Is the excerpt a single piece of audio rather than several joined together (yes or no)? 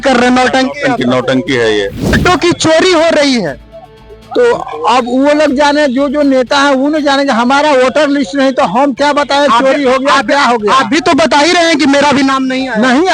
no